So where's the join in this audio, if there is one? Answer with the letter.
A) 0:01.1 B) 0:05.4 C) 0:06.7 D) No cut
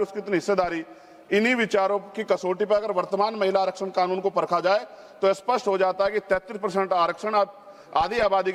D